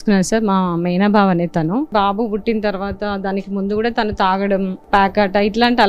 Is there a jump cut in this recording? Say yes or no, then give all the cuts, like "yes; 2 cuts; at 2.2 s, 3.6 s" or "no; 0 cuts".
yes; 2 cuts; at 1.9 s, 4.8 s